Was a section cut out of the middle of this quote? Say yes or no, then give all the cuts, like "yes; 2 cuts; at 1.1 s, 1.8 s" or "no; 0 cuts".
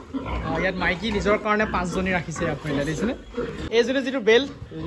yes; 1 cut; at 3.7 s